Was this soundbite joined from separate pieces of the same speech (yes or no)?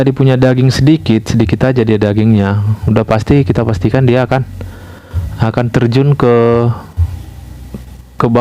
no